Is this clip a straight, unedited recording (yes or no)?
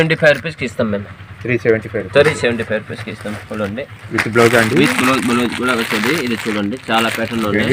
yes